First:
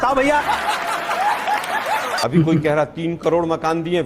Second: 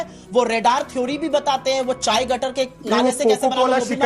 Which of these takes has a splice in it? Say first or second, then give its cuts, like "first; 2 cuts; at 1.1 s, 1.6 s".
first; 1 cut; at 2.2 s